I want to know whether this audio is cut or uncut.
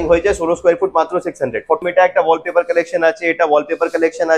cut